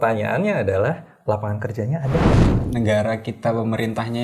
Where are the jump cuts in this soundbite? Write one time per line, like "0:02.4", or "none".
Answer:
0:02.5